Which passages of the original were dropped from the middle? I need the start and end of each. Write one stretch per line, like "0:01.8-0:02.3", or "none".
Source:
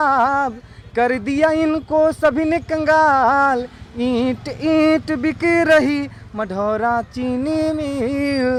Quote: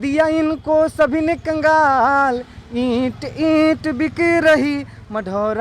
none